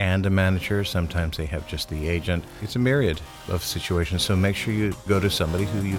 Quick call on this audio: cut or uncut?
cut